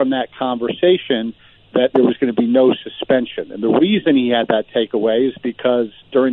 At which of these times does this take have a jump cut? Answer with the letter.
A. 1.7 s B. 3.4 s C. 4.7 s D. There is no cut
D